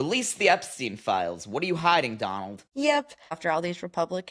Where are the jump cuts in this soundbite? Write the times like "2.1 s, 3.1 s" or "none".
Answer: 3.4 s